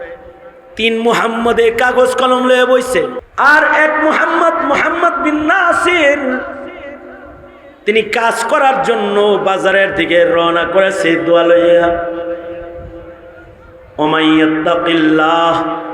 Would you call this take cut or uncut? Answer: cut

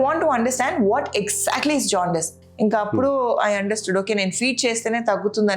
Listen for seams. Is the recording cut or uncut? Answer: cut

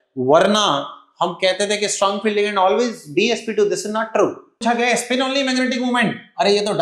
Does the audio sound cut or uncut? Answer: cut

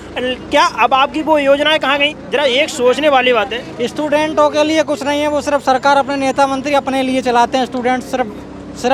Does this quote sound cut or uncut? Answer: uncut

